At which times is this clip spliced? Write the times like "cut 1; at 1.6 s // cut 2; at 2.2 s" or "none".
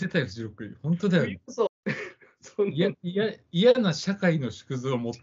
cut 1; at 1.7 s